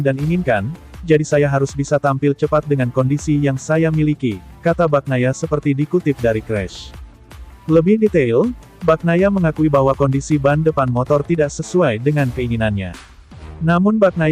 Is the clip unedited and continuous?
yes; 0 cuts

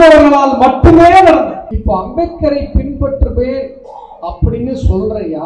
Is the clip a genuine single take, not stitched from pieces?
no; 1 cut; at 1.7 s

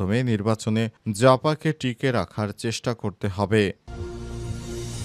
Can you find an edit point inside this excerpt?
yes; 1 cut; at 3.9 s

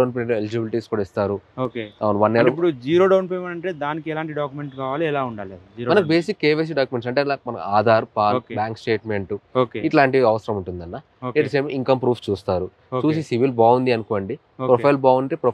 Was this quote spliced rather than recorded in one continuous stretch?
no; 0 cuts

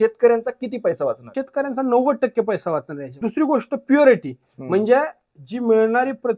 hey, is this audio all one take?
no; 2 cuts; at 1.3 s, 3.2 s

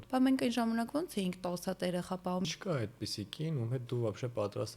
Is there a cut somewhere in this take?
yes; 1 cut; at 2.4 s

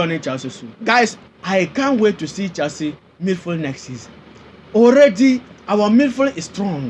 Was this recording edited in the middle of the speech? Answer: yes; 1 cut; at 1.3 s

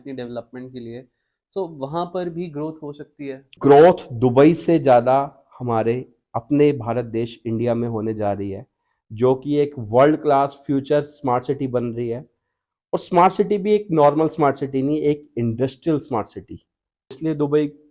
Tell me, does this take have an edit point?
yes; 2 cuts; at 3.5 s, 17.1 s

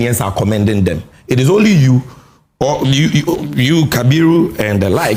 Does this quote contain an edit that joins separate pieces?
no; 0 cuts

